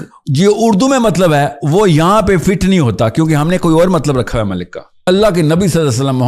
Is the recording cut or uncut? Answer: cut